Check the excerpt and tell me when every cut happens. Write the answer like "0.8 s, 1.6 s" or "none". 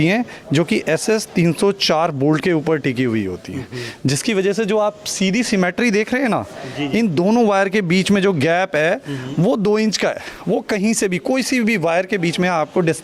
none